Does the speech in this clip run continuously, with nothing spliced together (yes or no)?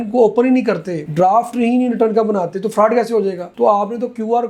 yes